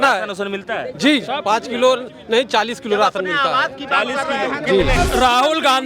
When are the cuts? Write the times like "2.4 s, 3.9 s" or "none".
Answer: 4.9 s